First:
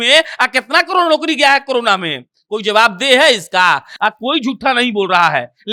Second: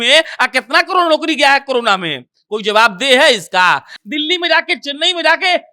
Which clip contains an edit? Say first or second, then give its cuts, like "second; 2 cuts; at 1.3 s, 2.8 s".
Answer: second; 1 cut; at 3.9 s